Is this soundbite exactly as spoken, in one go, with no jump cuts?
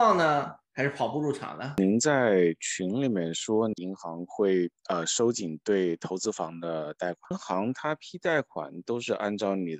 no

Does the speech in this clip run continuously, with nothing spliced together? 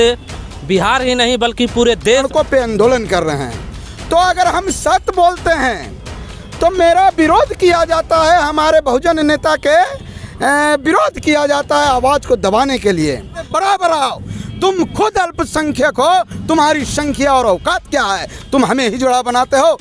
no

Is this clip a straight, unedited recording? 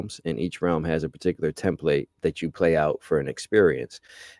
no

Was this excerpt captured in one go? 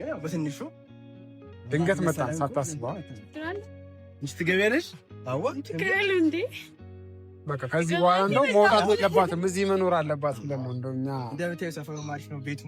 yes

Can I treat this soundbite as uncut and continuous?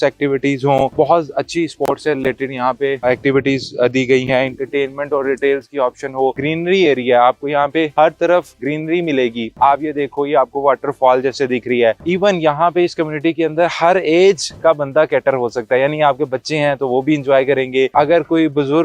no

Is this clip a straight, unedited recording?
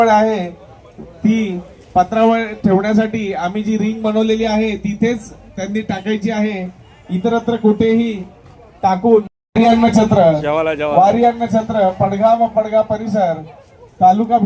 yes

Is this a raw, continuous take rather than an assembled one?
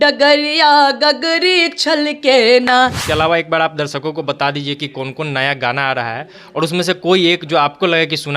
no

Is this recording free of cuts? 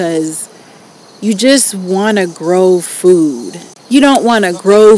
no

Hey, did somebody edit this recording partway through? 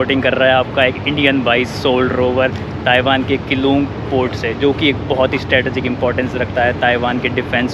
no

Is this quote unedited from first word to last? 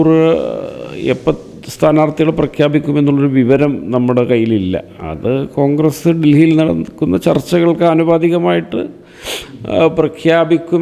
yes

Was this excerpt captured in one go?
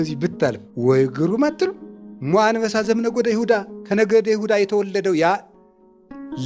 yes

